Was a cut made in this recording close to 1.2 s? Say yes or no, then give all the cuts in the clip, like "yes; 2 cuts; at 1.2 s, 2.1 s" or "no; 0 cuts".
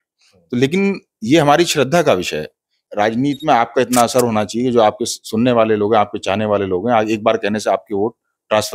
no; 1 cut; at 2.8 s